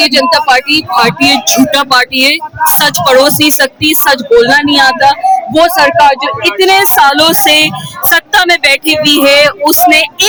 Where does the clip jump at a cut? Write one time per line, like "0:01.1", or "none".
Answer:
none